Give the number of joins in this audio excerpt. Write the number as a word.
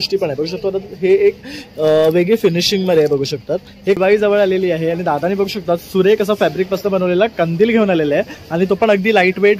one